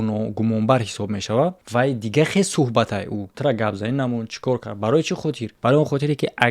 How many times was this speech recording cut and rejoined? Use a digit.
3